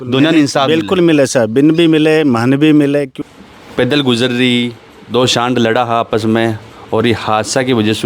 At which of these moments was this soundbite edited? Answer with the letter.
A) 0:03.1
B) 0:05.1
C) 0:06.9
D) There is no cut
A